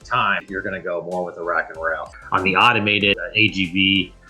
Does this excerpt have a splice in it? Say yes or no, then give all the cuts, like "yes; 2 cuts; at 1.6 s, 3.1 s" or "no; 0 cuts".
yes; 1 cut; at 2.1 s